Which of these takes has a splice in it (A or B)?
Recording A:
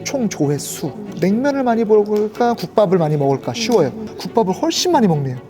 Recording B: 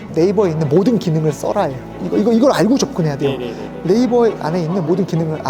A